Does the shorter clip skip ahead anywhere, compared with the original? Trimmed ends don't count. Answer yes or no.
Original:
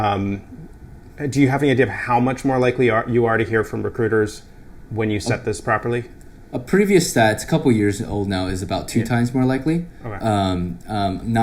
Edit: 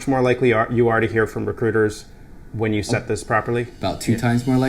yes